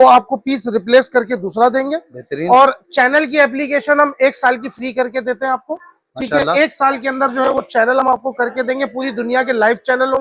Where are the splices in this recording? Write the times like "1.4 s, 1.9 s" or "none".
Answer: none